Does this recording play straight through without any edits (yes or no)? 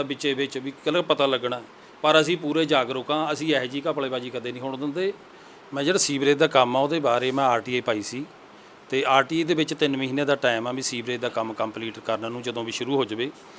no